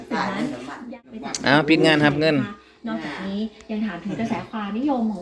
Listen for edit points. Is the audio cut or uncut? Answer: cut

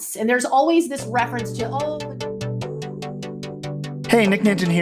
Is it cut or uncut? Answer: cut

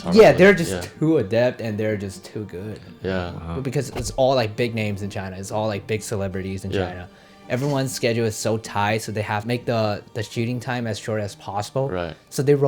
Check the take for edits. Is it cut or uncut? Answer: cut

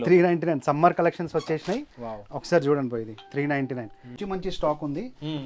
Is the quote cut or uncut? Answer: cut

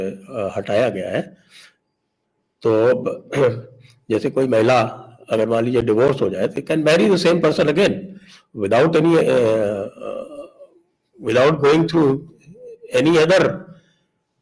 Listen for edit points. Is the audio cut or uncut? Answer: uncut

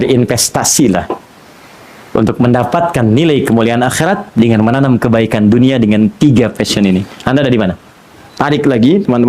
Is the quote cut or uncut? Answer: cut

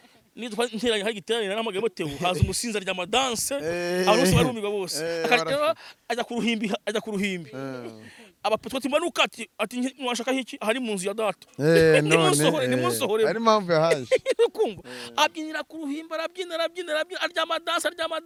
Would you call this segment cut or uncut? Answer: uncut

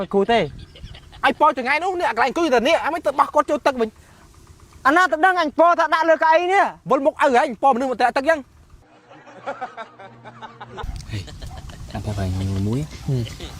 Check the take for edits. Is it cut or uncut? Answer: cut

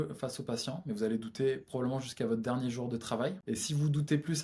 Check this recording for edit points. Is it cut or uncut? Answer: cut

